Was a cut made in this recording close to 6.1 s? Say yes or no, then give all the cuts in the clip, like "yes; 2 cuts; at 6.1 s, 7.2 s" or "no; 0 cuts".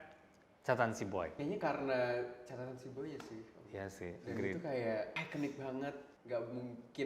yes; 3 cuts; at 1.3 s, 5.2 s, 6.1 s